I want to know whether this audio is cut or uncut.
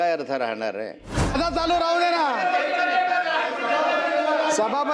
cut